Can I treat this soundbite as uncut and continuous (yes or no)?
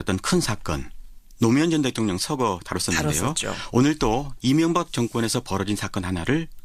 yes